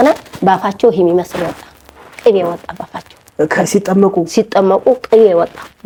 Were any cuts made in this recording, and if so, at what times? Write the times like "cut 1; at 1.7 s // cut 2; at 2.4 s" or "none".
none